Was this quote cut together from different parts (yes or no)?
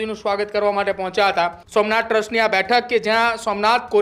yes